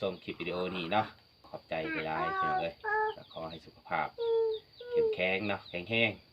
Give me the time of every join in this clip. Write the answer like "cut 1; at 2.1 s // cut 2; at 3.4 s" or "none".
cut 1; at 1.5 s

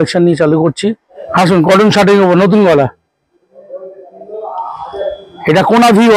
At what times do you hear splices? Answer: cut 1; at 1.1 s

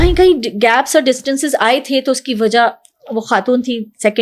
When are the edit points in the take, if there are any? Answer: none

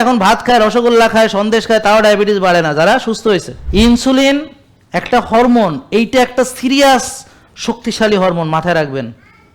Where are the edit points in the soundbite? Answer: cut 1; at 3.6 s

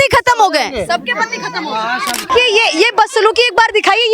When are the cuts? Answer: cut 1; at 2.3 s

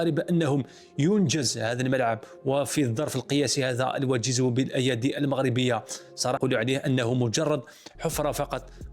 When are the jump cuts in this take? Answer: cut 1; at 6.4 s

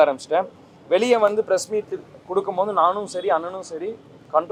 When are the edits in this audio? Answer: none

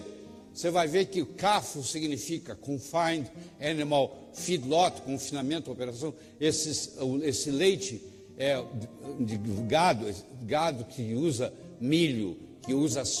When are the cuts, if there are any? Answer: none

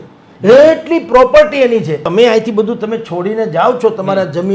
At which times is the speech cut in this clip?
cut 1; at 2.0 s

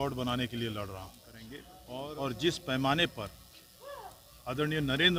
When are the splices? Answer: cut 1; at 1.7 s

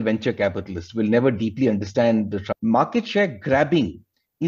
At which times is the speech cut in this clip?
cut 1; at 2.4 s

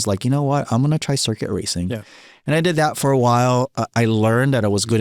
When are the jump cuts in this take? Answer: none

